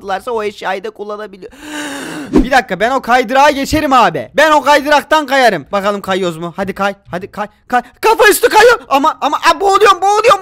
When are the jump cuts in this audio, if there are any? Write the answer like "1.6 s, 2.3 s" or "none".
2.3 s